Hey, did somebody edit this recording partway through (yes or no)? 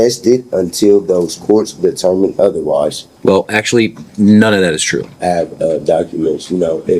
yes